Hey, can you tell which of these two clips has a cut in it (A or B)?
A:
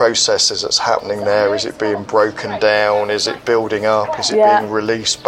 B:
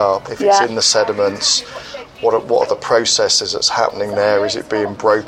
A